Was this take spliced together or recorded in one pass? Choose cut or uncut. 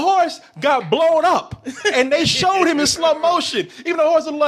uncut